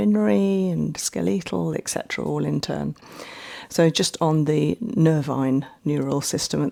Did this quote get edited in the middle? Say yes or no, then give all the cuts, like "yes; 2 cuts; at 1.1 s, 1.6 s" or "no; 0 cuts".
no; 0 cuts